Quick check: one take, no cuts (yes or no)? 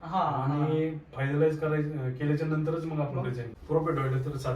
no